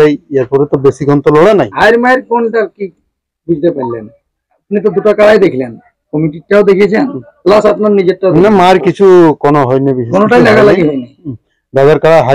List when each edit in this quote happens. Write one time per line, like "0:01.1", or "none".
none